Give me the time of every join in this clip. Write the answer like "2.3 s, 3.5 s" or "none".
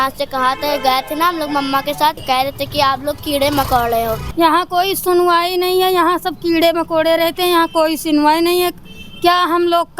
2.2 s, 4.2 s